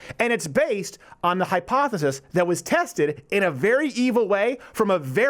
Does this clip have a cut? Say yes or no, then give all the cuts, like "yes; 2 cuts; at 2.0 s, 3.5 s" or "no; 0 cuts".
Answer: no; 0 cuts